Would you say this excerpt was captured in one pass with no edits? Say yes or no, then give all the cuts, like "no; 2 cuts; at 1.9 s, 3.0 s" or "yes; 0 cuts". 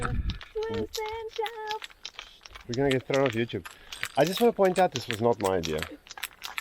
yes; 0 cuts